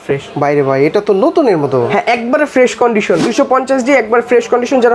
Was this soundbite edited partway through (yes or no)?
yes